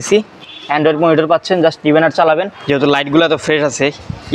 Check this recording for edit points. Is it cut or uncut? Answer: cut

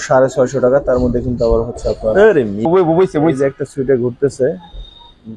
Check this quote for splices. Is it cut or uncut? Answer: cut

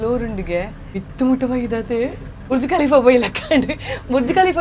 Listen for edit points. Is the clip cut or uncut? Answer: cut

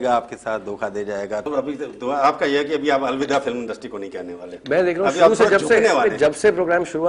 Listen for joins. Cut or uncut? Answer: uncut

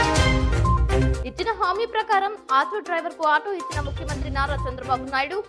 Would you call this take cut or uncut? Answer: cut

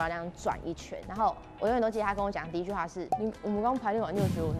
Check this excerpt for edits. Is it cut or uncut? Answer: cut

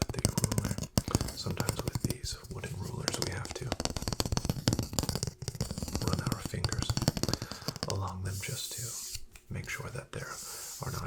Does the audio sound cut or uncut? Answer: uncut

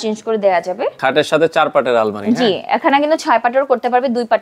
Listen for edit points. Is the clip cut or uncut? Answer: cut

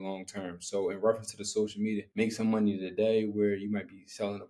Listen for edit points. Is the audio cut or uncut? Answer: uncut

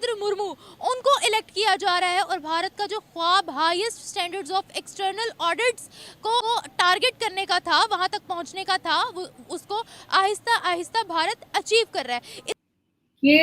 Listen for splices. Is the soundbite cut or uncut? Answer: cut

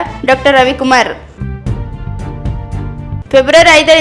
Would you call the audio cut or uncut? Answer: cut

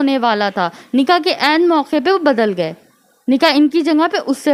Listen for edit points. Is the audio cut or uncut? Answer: uncut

